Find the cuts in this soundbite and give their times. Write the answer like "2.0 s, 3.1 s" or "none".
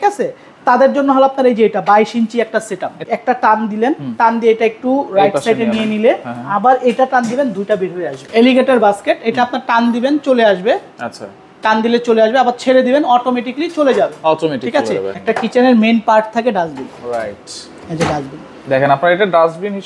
3.1 s, 8.1 s, 15.1 s